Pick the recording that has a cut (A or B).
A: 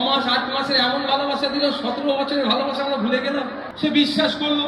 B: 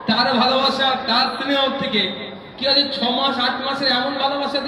A